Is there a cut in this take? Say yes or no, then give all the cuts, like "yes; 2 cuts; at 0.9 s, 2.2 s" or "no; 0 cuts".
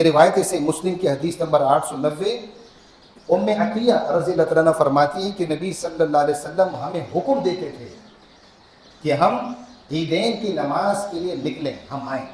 no; 0 cuts